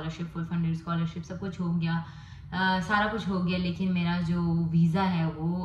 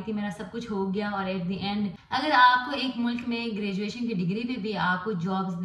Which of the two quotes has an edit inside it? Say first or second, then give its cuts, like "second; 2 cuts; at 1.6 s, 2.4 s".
second; 1 cut; at 2.0 s